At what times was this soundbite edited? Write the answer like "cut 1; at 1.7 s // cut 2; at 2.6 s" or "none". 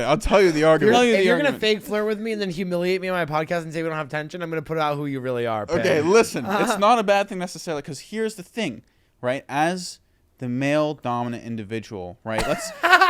cut 1; at 0.9 s